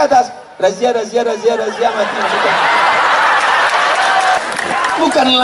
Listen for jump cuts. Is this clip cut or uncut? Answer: cut